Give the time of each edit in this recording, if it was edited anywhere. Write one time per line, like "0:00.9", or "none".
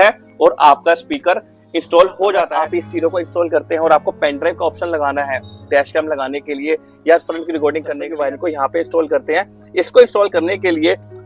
0:02.5
0:08.0